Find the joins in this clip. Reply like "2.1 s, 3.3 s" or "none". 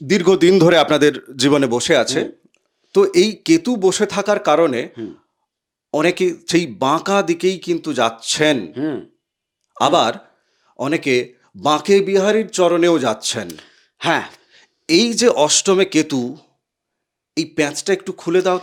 none